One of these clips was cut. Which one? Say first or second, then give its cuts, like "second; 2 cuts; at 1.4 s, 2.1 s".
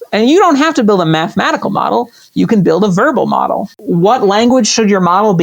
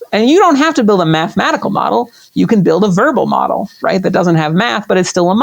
first; 1 cut; at 3.7 s